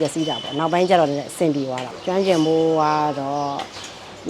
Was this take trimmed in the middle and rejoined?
no; 0 cuts

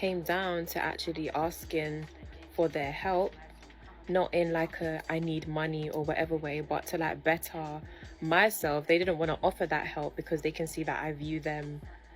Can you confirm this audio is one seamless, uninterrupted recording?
yes; 0 cuts

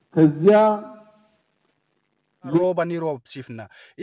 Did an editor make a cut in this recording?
yes; 1 cut; at 2.6 s

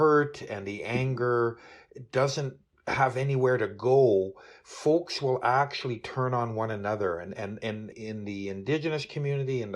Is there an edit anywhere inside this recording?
yes; 1 cut; at 7.8 s

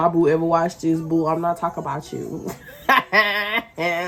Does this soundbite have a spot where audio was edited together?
no; 0 cuts

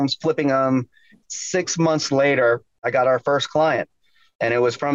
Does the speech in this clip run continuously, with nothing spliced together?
no; 2 cuts; at 1.2 s, 2.9 s

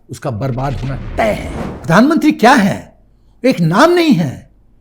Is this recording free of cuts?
no; 1 cut; at 1.6 s

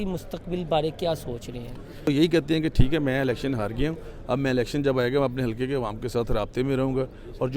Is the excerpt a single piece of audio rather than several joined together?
no; 1 cut; at 2.1 s

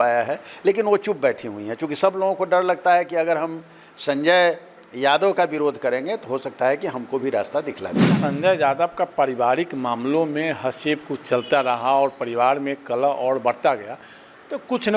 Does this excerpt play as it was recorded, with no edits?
no; 1 cut; at 8.2 s

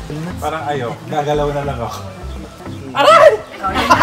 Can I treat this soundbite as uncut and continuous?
no; 1 cut; at 2.5 s

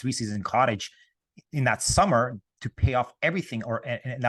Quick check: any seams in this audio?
no; 0 cuts

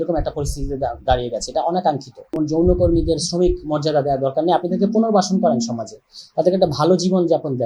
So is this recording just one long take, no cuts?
no; 1 cut; at 2.4 s

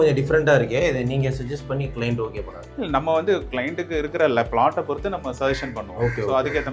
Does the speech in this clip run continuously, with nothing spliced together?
no; 1 cut; at 2.6 s

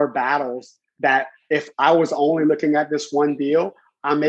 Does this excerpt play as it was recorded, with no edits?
yes; 0 cuts

